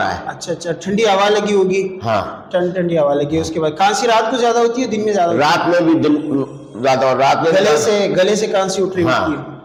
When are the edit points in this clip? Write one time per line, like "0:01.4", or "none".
none